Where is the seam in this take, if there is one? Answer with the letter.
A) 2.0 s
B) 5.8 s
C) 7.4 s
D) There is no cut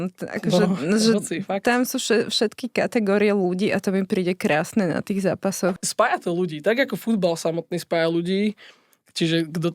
B